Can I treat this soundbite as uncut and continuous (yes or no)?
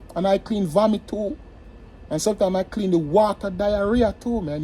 yes